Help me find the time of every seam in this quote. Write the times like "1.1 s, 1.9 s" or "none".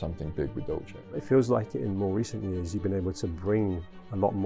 1.1 s